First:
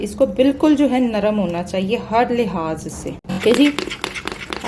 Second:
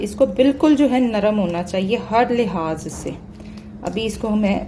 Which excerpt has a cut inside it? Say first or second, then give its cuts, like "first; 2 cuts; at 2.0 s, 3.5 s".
first; 1 cut; at 3.3 s